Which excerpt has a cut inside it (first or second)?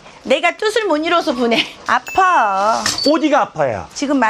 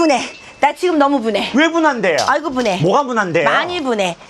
first